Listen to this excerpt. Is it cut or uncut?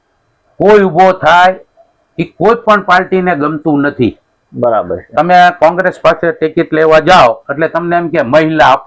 uncut